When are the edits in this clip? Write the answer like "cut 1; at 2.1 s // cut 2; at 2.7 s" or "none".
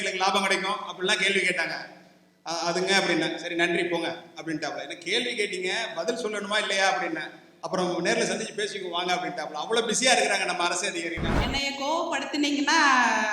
cut 1; at 11.3 s